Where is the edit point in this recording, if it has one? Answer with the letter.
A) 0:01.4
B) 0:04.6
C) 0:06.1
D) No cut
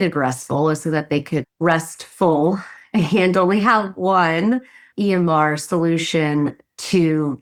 D